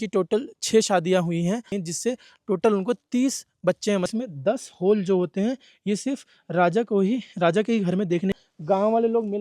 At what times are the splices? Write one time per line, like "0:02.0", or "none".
0:01.7
0:04.1
0:08.4

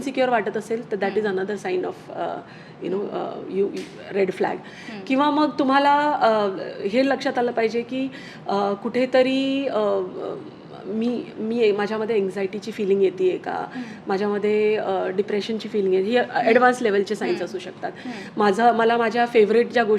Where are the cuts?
none

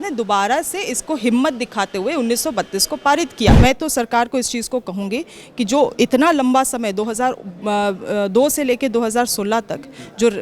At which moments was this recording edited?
0:03.5

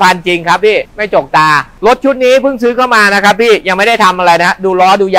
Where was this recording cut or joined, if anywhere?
0:01.7

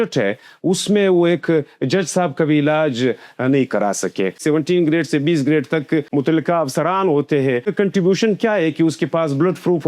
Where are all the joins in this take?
0:04.4
0:06.1
0:07.7

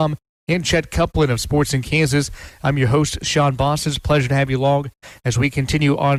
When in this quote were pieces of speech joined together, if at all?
none

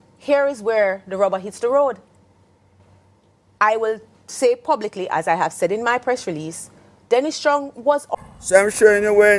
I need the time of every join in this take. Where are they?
0:08.1

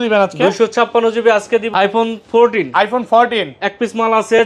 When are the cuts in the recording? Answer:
0:01.7

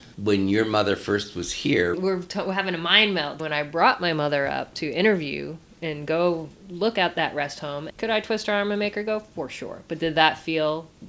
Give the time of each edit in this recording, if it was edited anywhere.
0:02.0
0:03.4

